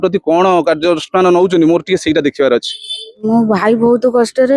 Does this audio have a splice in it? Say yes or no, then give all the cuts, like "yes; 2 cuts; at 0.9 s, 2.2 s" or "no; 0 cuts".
yes; 1 cut; at 3.3 s